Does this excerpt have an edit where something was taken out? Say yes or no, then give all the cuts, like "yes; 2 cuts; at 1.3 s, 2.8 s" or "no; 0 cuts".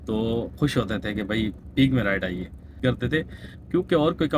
yes; 1 cut; at 2.8 s